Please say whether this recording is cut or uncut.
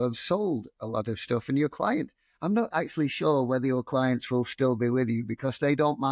uncut